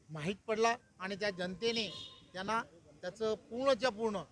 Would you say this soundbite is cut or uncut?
uncut